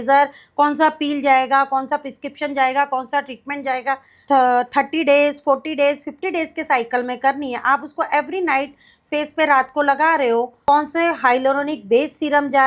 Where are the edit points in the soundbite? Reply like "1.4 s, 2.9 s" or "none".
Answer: 4.1 s, 10.5 s